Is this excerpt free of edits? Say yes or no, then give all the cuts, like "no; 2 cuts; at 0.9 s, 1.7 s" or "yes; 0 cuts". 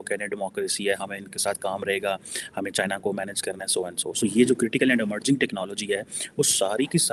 yes; 0 cuts